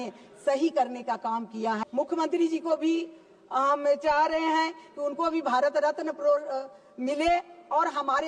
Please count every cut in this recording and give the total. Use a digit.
1